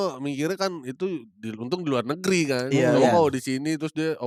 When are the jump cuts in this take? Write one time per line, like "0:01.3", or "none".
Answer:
none